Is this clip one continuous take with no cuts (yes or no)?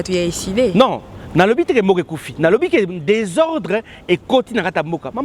yes